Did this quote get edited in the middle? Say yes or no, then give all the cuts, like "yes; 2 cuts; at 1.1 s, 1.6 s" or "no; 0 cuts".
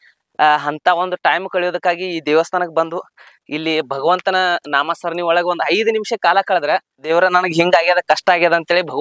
yes; 1 cut; at 7.1 s